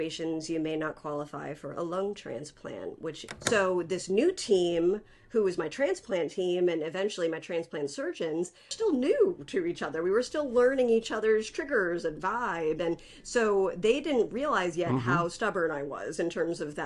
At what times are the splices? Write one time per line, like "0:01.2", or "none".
0:03.2

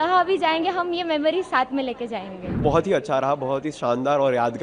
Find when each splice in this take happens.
0:02.6

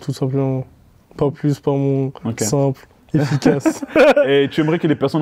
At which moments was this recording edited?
none

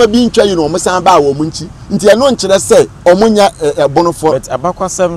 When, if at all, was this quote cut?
0:02.9

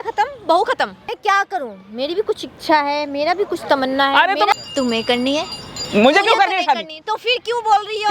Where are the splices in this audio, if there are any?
0:01.0
0:04.5

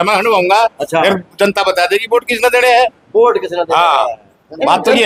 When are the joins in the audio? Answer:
none

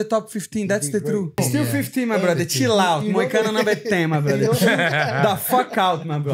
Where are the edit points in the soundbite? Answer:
0:01.4

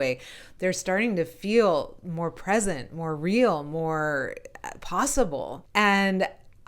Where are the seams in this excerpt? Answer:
0:05.6

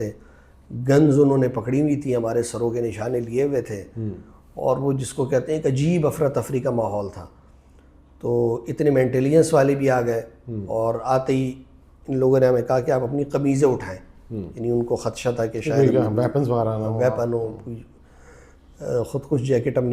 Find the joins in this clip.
none

